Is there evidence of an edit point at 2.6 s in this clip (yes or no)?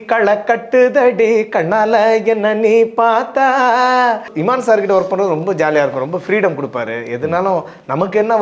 no